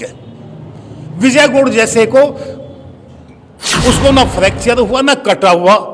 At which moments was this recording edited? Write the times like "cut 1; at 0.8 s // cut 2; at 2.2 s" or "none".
cut 1; at 3.6 s